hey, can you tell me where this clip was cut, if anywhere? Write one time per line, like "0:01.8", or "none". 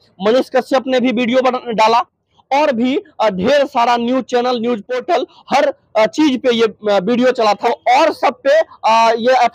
0:05.3
0:07.6